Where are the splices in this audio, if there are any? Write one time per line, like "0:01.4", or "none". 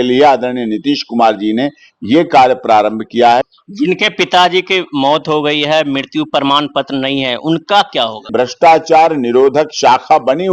0:03.6
0:08.3